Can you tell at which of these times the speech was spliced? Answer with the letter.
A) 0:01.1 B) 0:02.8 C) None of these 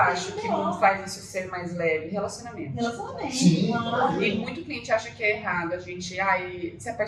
C